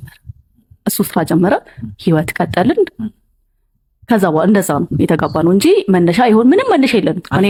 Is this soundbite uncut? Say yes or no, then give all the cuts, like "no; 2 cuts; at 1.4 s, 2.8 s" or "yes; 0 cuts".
yes; 0 cuts